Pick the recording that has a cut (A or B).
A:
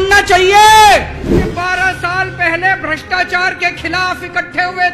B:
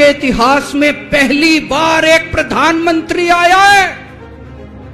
A